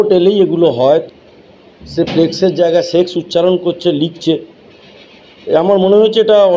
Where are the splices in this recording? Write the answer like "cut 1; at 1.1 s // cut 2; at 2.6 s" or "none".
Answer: cut 1; at 1.0 s